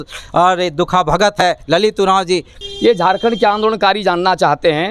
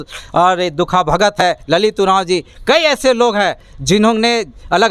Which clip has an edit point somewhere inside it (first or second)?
first